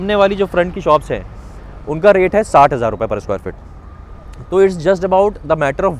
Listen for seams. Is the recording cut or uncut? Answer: uncut